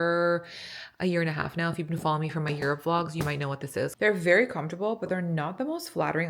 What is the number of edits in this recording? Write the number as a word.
one